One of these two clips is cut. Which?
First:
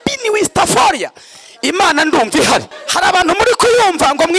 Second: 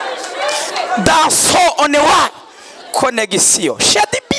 first; 1 cut; at 2.8 s

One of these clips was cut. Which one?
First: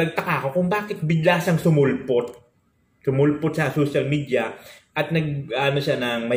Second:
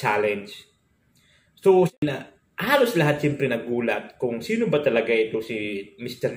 second; 1 cut; at 1.9 s

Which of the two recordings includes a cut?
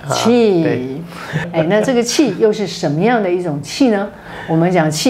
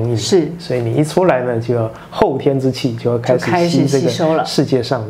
first; 1 cut; at 1.5 s

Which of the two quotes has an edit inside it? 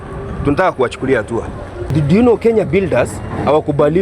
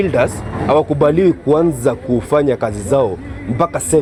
first; 1 cut; at 1.9 s

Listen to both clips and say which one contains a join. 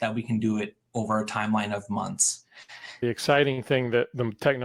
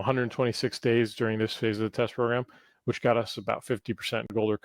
first; 1 cut; at 3.0 s

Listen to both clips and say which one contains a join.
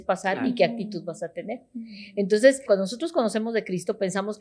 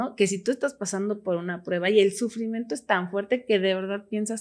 first; 1 cut; at 2.6 s

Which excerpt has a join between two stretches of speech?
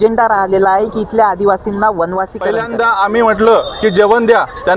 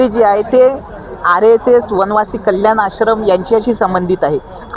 first; 1 cut; at 2.5 s

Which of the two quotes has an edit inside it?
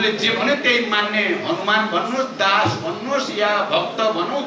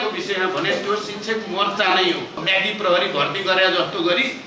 second; 1 cut; at 2.4 s

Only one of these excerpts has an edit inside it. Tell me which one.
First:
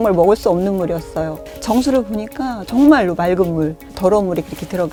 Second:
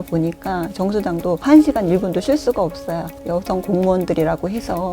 second; 1 cut; at 3.1 s

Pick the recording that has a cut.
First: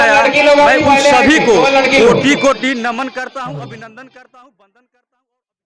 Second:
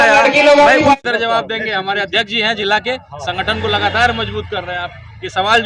second; 1 cut; at 1.0 s

